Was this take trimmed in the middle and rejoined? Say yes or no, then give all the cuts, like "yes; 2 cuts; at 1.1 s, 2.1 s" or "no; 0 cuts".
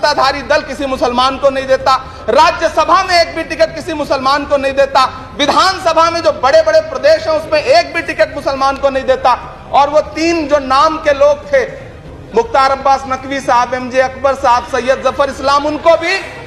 no; 0 cuts